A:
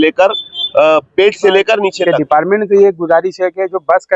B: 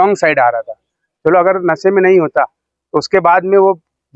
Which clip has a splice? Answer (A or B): A